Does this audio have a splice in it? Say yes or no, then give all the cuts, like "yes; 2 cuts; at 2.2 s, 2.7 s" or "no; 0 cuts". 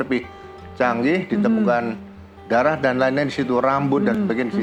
no; 0 cuts